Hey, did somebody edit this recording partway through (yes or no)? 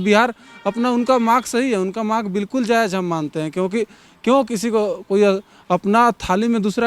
no